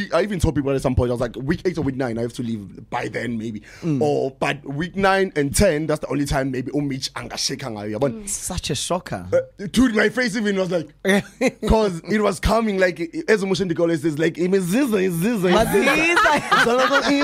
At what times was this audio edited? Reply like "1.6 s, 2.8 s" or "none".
none